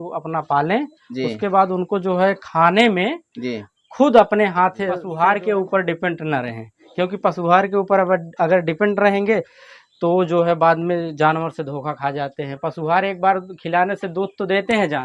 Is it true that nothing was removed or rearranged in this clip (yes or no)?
no